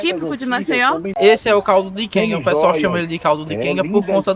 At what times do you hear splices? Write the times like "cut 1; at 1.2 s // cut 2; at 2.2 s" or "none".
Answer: cut 1; at 1.2 s